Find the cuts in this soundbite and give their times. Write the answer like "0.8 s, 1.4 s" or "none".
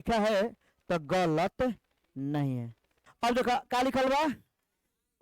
3.1 s